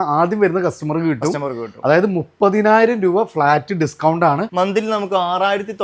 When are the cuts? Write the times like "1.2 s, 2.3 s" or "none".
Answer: 4.5 s